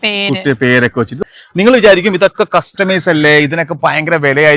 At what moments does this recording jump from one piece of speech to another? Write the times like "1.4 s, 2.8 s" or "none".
1.2 s